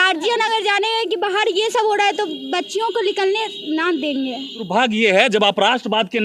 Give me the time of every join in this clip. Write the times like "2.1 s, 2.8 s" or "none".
4.7 s